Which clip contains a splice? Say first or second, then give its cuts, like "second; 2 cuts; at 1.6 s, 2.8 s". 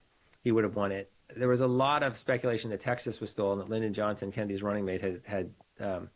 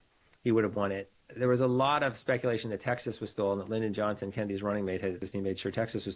second; 1 cut; at 5.2 s